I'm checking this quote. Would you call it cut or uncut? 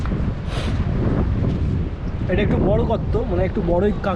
uncut